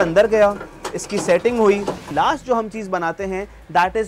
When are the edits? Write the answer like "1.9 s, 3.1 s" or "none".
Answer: 2.1 s